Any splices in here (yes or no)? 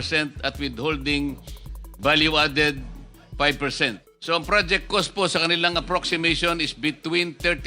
yes